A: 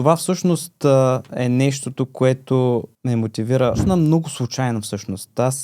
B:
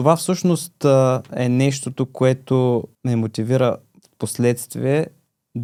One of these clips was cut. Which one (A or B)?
A